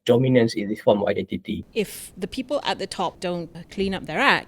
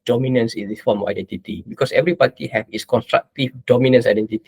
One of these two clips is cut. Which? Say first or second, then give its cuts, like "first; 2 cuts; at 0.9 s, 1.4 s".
first; 2 cuts; at 1.6 s, 3.6 s